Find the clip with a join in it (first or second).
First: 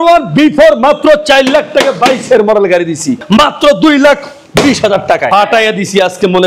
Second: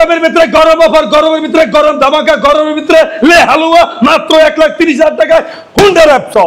first